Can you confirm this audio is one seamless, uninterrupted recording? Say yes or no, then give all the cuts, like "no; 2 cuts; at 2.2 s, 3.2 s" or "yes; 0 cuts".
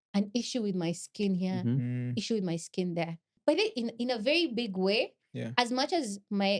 no; 1 cut; at 3.3 s